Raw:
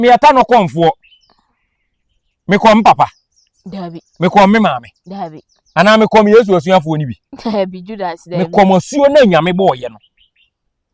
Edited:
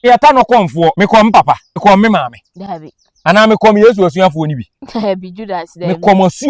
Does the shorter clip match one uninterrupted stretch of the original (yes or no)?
no